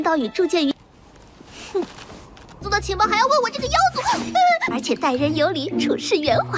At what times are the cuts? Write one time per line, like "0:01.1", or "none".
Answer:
none